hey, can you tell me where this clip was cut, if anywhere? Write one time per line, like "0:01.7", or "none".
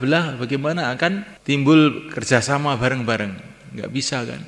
0:01.3